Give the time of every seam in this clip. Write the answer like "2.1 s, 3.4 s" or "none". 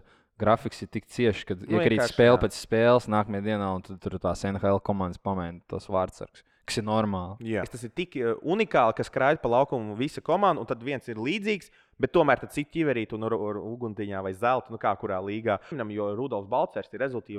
7.8 s, 15.8 s